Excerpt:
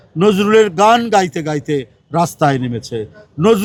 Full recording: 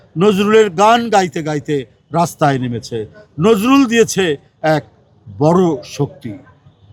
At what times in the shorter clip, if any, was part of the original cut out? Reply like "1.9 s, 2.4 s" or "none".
none